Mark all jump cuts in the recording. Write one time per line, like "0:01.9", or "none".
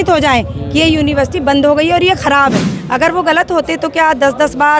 0:02.7